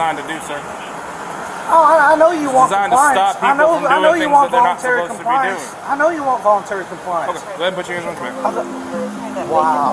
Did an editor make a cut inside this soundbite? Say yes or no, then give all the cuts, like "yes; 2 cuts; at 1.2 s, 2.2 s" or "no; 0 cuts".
no; 0 cuts